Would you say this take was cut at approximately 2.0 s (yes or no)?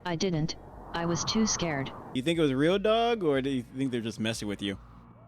yes